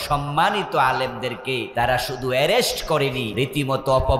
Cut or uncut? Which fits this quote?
cut